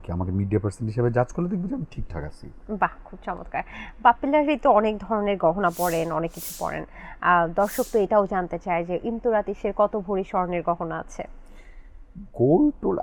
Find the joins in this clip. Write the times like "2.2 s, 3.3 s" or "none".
none